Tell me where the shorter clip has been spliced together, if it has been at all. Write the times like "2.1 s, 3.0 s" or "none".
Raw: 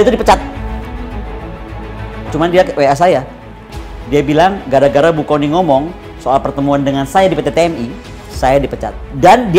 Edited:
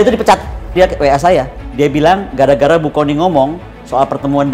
0.7 s, 1.6 s